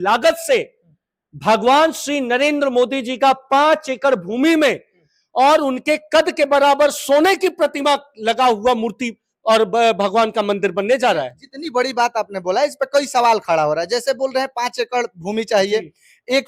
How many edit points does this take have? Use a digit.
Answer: 0